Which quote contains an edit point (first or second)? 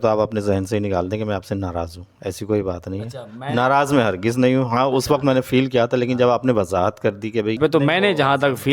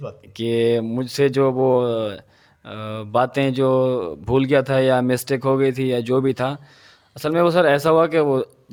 first